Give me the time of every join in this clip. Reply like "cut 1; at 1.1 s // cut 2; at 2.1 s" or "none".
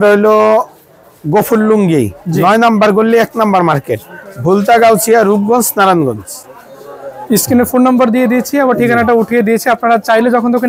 none